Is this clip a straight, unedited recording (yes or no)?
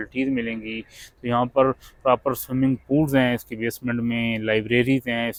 yes